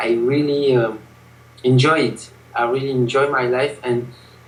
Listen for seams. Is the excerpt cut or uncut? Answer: uncut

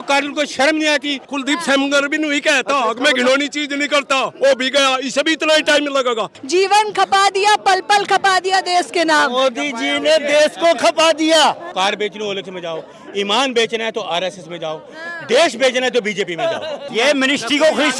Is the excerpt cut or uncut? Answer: cut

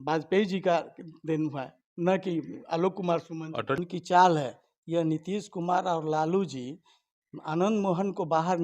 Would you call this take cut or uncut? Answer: cut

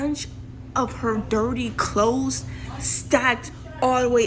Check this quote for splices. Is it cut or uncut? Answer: uncut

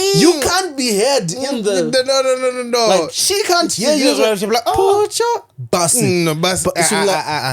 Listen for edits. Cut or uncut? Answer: uncut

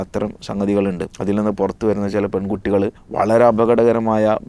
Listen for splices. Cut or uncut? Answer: cut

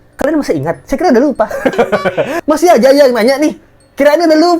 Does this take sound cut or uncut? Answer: cut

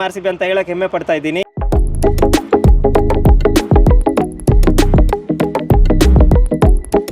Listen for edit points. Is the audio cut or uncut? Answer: cut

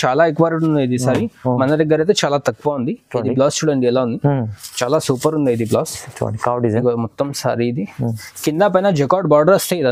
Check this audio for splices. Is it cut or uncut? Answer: uncut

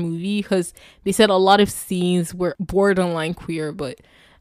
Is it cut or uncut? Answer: cut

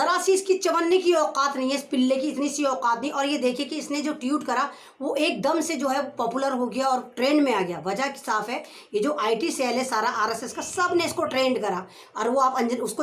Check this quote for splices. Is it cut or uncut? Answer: uncut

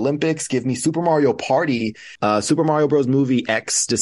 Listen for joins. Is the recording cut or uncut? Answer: cut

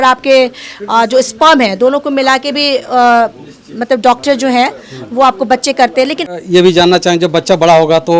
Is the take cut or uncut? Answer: cut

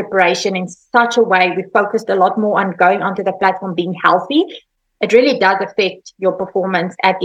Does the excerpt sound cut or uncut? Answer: cut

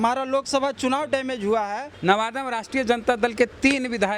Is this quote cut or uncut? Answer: cut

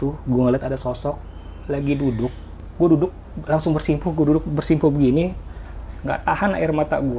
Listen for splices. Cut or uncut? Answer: cut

